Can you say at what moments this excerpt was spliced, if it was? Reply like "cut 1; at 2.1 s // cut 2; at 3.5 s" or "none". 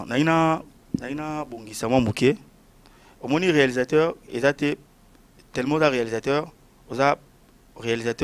none